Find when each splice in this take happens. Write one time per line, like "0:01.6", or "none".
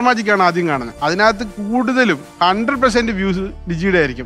0:00.9
0:02.3